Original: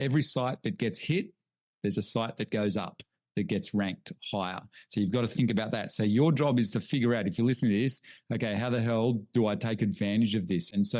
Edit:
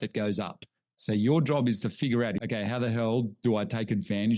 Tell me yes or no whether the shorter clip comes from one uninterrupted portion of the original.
no